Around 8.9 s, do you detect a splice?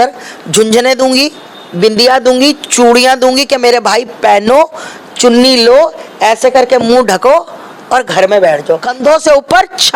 yes; 1 cut; at 8.9 s

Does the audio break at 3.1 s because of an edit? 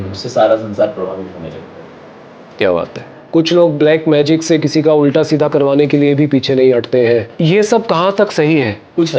yes; 2 cuts; at 3.1 s, 7.3 s

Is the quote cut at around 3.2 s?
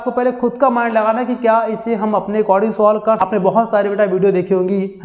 yes; 1 cut; at 3.2 s

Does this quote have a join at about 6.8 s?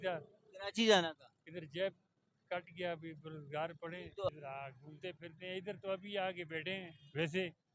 no; 1 cut; at 4.3 s

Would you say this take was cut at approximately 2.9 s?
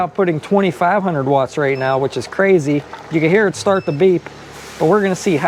no; 0 cuts

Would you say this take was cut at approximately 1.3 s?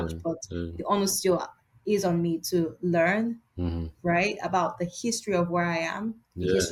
no; 0 cuts

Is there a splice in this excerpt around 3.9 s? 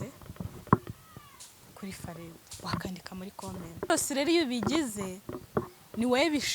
yes; 1 cut; at 3.9 s

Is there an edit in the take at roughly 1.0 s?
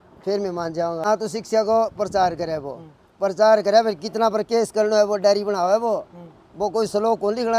yes; 1 cut; at 1.0 s

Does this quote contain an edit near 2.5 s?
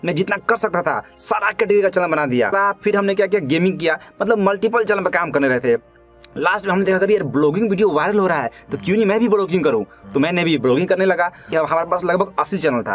yes; 2 cuts; at 2.5 s, 11.5 s

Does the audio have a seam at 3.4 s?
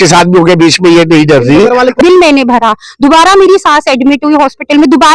no; 1 cut; at 2.0 s

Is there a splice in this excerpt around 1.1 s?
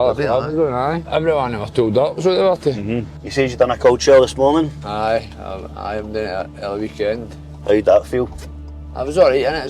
yes; 2 cuts; at 1.1 s, 3.1 s

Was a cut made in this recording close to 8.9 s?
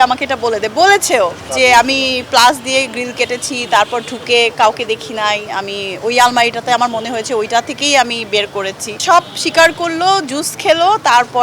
yes; 1 cut; at 8.9 s

